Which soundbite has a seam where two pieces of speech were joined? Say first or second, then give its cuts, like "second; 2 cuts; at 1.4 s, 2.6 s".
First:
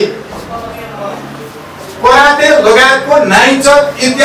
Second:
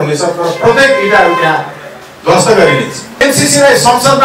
second; 1 cut; at 3.0 s